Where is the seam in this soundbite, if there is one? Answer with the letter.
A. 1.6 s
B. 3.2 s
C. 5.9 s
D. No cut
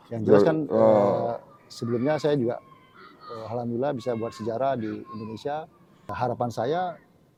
D